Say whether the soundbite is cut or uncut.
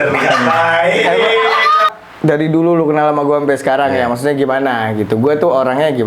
cut